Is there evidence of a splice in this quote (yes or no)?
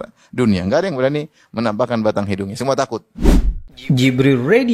yes